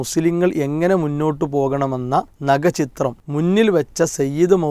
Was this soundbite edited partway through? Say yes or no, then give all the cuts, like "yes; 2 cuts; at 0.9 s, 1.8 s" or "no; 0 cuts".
yes; 2 cuts; at 2.3 s, 3.2 s